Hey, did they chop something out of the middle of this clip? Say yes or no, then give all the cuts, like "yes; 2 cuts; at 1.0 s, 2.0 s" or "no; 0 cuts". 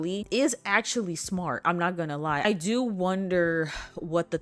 yes; 1 cut; at 2.4 s